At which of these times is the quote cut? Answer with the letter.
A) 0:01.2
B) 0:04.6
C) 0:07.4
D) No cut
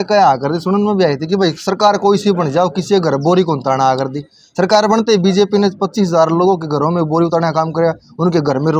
D